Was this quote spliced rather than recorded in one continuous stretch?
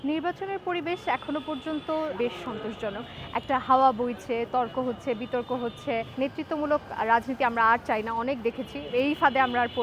yes; 2 cuts; at 2.1 s, 6.1 s

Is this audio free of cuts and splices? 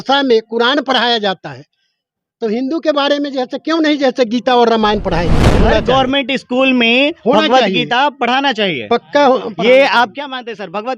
no; 1 cut; at 5.6 s

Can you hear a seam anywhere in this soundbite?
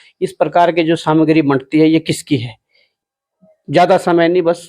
yes; 1 cut; at 2.9 s

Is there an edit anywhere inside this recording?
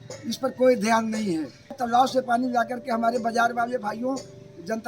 yes; 1 cut; at 1.8 s

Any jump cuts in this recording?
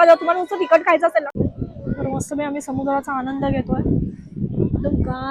yes; 1 cut; at 1.3 s

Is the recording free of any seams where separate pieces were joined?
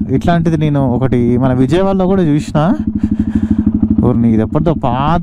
yes; 0 cuts

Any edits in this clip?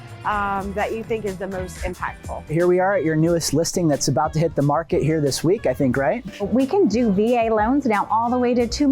yes; 2 cuts; at 2.5 s, 6.4 s

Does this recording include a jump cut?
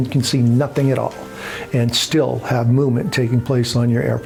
no; 0 cuts

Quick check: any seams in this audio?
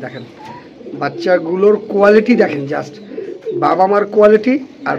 no; 0 cuts

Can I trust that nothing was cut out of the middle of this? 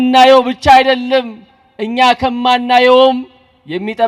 yes; 0 cuts

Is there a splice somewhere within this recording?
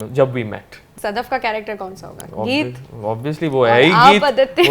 yes; 1 cut; at 0.9 s

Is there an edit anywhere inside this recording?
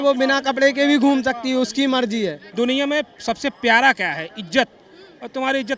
yes; 1 cut; at 2.4 s

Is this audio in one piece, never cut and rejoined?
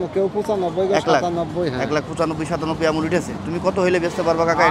yes; 0 cuts

